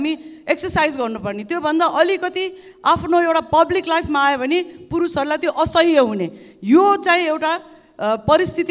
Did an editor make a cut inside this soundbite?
no; 0 cuts

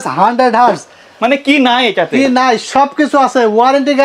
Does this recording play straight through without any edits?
yes; 0 cuts

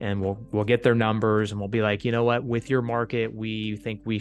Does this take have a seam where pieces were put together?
no; 0 cuts

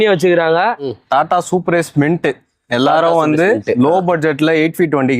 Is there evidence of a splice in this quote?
yes; 1 cut; at 1.0 s

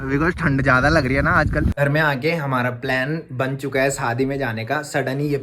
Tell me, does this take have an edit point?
yes; 1 cut; at 1.8 s

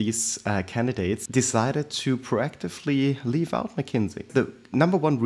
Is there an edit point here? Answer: yes; 2 cuts; at 1.2 s, 4.3 s

